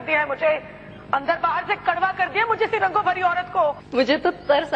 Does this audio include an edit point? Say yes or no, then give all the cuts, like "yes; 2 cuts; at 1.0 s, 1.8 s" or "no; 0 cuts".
yes; 1 cut; at 3.8 s